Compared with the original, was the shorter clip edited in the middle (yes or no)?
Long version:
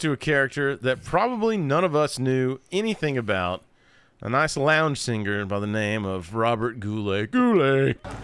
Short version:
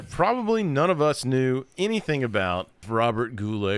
yes